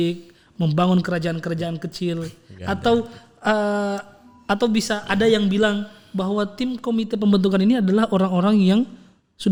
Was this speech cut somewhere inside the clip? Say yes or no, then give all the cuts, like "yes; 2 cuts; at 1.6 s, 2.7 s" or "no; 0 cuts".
no; 0 cuts